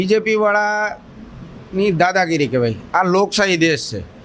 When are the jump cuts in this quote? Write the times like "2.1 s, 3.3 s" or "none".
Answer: none